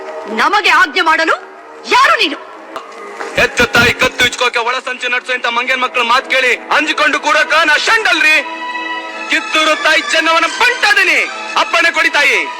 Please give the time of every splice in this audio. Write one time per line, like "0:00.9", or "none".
0:03.0